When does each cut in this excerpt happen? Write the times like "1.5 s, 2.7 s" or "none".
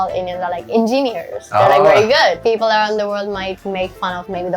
2.4 s